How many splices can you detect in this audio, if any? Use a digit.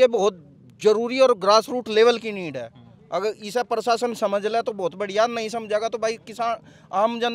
0